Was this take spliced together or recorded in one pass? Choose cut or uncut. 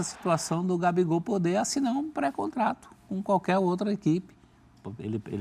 uncut